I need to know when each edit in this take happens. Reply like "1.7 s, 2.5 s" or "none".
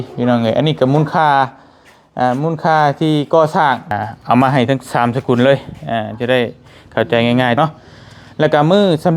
3.9 s, 7.6 s